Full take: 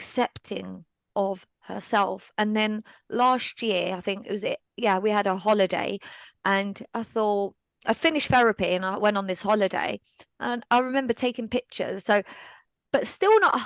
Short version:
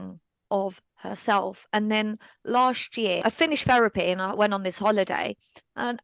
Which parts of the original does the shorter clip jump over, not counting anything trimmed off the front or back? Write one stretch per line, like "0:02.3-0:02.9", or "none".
0:03.8-0:07.8